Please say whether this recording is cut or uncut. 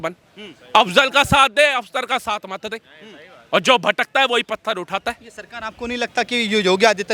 uncut